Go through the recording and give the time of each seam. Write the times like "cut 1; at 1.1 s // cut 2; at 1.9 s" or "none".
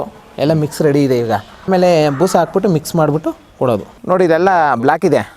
cut 1; at 1.6 s // cut 2; at 3.9 s